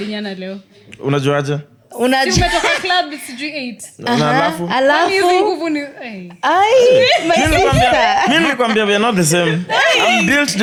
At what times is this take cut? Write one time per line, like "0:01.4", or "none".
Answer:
none